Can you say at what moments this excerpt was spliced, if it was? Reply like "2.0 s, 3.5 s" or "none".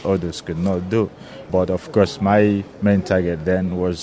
1.5 s, 2.7 s